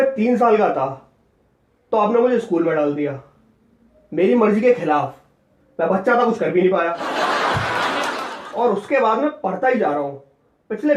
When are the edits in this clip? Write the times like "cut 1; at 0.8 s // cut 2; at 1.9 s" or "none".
cut 1; at 7.0 s // cut 2; at 8.4 s